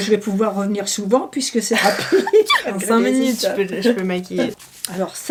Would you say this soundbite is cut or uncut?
uncut